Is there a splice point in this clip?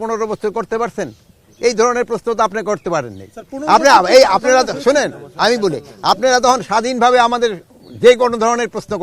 no; 0 cuts

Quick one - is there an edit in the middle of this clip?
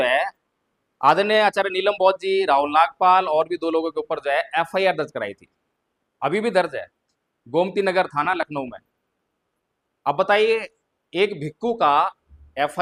no; 0 cuts

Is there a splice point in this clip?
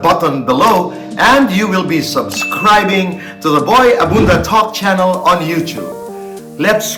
no; 0 cuts

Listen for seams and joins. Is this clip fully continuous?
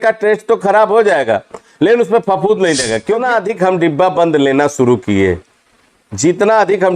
no; 1 cut; at 3.2 s

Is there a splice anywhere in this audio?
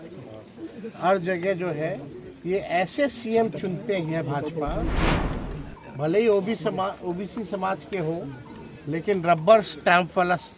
no; 0 cuts

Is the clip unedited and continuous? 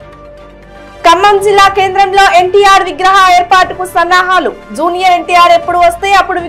no; 1 cut; at 0.9 s

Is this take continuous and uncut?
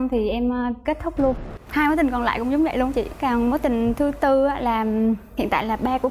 no; 1 cut; at 1.5 s

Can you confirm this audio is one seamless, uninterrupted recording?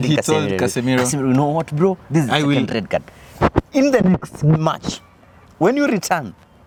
yes; 0 cuts

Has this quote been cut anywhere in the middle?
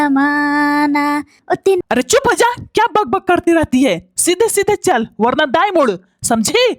yes; 1 cut; at 1.8 s

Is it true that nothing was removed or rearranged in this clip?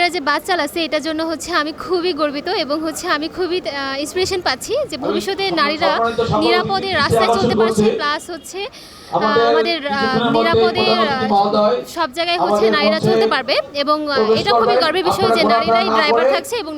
yes; 0 cuts

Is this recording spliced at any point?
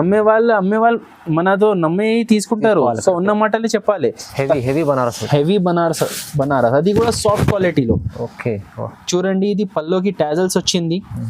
yes; 1 cut; at 4.2 s

